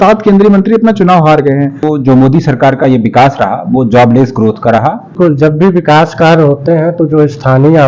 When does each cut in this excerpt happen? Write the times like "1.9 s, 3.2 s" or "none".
1.8 s, 5.1 s